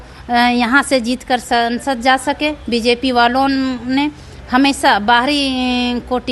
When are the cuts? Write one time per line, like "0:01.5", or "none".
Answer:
none